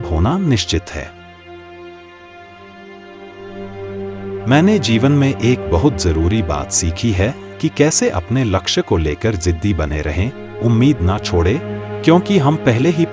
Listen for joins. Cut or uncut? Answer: cut